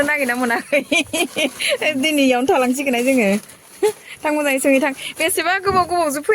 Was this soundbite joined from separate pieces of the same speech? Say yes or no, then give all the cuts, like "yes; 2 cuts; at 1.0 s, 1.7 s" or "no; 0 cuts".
no; 0 cuts